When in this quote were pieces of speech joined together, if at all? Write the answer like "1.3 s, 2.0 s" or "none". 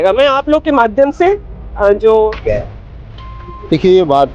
2.4 s